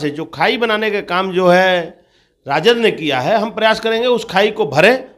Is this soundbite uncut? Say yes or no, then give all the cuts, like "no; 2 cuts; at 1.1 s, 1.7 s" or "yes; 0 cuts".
yes; 0 cuts